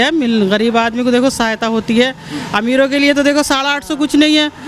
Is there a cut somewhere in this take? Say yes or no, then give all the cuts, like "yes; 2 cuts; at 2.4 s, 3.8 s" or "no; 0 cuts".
no; 0 cuts